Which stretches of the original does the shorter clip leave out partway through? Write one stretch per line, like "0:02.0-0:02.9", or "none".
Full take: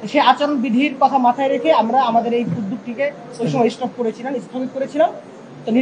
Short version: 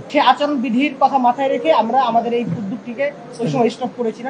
none